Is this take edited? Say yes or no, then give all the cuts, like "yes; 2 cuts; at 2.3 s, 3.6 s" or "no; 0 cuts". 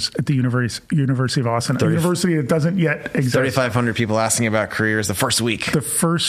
no; 0 cuts